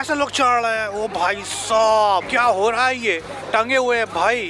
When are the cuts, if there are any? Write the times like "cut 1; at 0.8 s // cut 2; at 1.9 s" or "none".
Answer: cut 1; at 2.3 s // cut 2; at 3.3 s